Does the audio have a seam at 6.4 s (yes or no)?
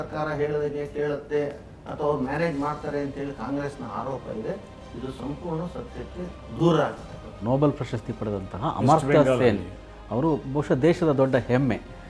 yes